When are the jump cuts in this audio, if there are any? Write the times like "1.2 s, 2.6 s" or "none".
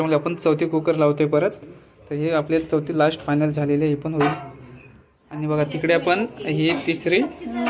none